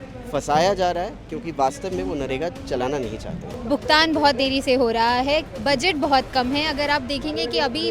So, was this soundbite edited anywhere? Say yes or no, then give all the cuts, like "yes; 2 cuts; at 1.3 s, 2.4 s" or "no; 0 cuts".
yes; 1 cut; at 3.6 s